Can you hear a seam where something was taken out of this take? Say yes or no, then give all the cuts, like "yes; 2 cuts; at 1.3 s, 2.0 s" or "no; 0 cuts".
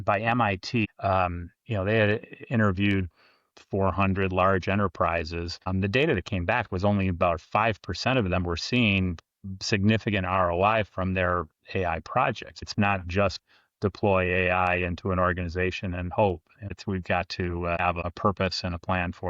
yes; 5 cuts; at 0.9 s, 5.6 s, 12.6 s, 16.7 s, 18.1 s